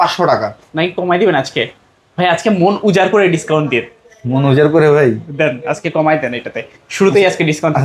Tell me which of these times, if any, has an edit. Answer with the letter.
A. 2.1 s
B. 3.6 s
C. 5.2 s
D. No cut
D